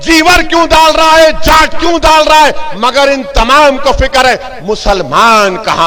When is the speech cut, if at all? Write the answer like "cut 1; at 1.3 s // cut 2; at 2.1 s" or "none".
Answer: none